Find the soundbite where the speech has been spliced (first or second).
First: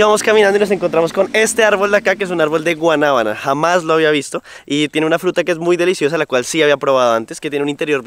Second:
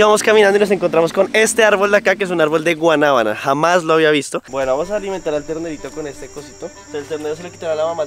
second